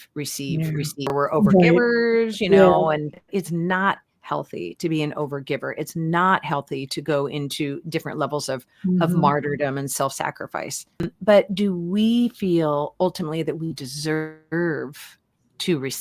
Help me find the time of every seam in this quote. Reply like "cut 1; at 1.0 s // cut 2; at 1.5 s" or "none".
cut 1; at 1.1 s // cut 2; at 3.2 s // cut 3; at 11.1 s